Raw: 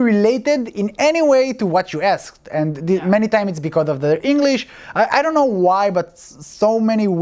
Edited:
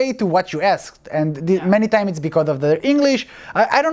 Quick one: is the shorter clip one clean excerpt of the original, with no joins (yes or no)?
yes